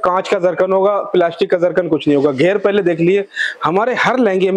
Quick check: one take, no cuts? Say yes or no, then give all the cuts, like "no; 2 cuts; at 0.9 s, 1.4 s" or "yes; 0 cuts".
yes; 0 cuts